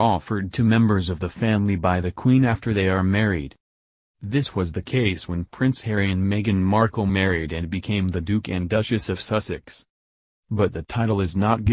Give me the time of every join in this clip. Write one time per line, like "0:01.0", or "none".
none